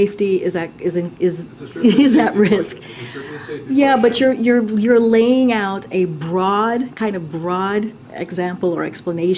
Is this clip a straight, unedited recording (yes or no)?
yes